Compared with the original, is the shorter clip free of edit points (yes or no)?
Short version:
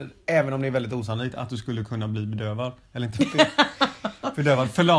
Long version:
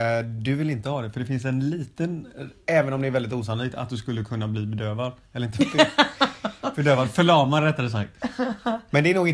yes